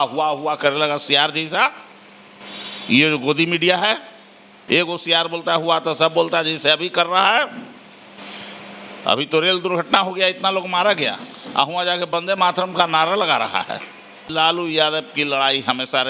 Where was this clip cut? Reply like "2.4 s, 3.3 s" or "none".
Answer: 14.2 s